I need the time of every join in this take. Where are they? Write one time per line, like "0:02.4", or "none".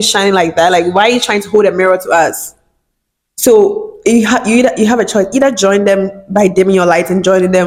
none